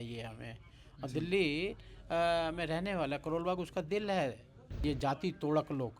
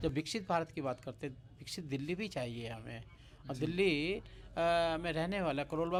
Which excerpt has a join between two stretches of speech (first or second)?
first